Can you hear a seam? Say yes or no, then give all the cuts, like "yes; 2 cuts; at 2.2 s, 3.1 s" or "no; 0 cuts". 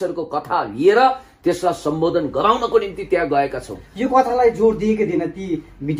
no; 0 cuts